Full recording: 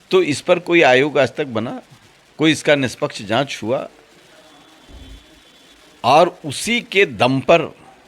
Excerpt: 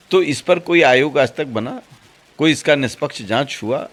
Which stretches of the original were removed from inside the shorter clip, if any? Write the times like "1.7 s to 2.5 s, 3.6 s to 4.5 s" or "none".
none